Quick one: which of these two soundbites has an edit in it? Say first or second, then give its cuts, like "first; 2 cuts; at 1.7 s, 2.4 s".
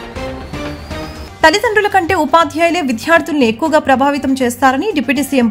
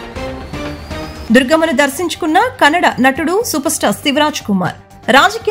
first; 1 cut; at 1.0 s